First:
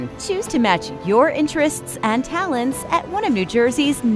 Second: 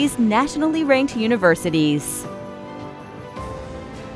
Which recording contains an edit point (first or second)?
second